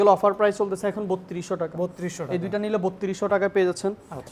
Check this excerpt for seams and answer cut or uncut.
uncut